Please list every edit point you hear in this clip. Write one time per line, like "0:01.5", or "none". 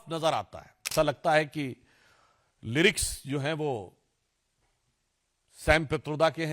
0:00.9